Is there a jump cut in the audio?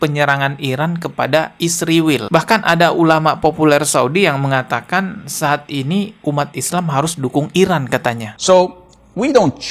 yes; 1 cut; at 8.3 s

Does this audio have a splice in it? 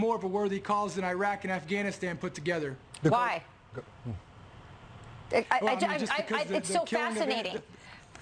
no; 0 cuts

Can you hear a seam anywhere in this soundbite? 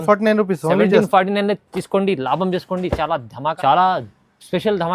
no; 0 cuts

